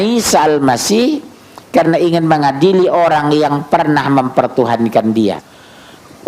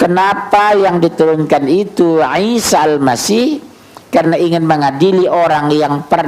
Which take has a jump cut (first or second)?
first